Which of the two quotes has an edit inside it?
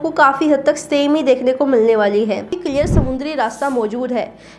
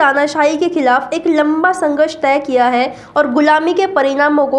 first; 1 cut; at 2.6 s

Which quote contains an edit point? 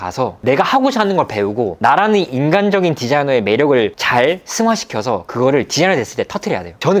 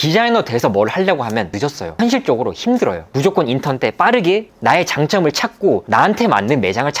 second; 4 cuts; at 1.5 s, 3.0 s, 4.5 s, 5.8 s

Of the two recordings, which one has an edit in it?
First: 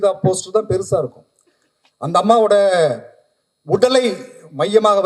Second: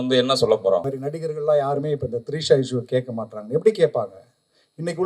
second; 1 cut; at 1.0 s

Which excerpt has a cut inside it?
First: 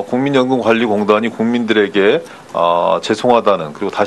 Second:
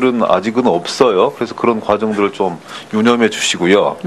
second; 1 cut; at 1.8 s

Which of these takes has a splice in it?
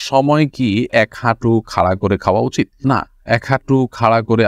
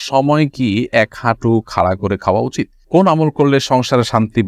second; 1 cut; at 2.7 s

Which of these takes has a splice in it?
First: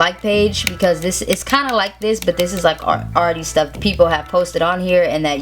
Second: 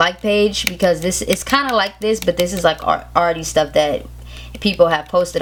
first; 1 cut; at 3.7 s

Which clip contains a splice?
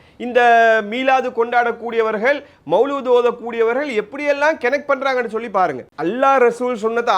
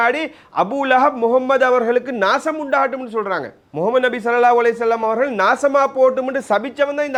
first; 1 cut; at 5.9 s

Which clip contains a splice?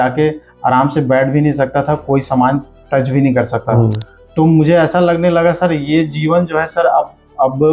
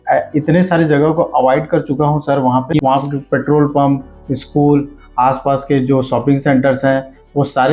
second; 1 cut; at 2.7 s

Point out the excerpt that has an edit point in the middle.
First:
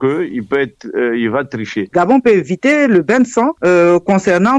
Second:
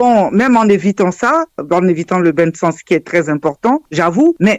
first; 1 cut; at 1.8 s

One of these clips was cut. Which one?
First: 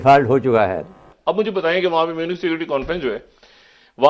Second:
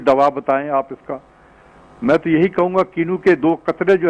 first; 1 cut; at 1.1 s

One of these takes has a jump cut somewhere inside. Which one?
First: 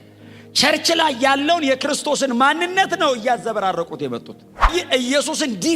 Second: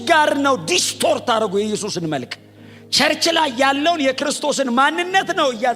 first; 1 cut; at 4.7 s

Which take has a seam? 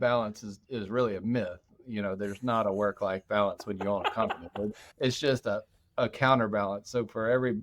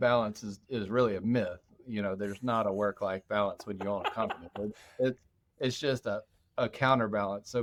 first; 1 cut; at 4.8 s

